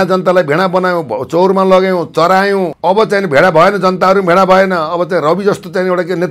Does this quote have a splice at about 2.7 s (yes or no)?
yes